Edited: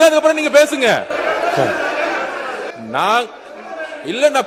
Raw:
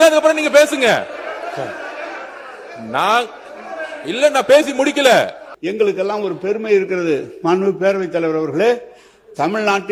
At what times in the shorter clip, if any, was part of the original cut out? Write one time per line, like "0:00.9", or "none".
none